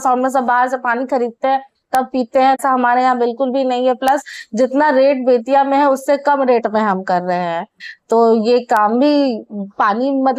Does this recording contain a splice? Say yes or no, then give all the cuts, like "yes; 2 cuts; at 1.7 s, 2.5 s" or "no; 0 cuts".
no; 0 cuts